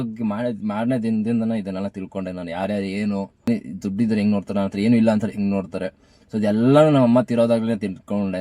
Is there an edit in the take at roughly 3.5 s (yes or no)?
yes